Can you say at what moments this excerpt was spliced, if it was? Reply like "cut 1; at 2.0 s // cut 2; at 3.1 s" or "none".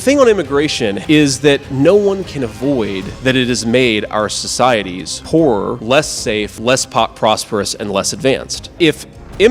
cut 1; at 1.0 s // cut 2; at 1.7 s // cut 3; at 8.6 s